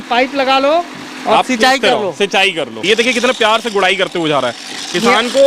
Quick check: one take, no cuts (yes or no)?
no